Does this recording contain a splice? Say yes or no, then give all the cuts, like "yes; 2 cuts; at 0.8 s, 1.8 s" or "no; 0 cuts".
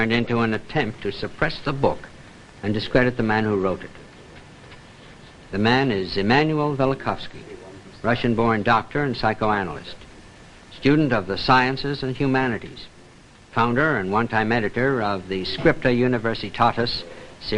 no; 0 cuts